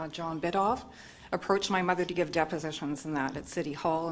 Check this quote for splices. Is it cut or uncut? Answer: uncut